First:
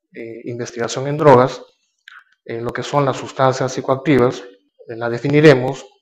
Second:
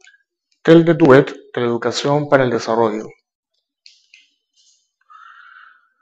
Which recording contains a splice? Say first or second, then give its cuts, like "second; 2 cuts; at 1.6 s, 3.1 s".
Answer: first; 1 cut; at 4.6 s